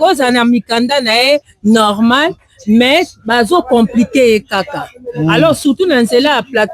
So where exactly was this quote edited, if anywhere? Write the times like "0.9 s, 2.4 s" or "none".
none